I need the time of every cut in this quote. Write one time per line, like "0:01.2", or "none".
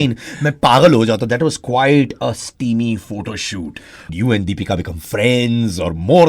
0:04.1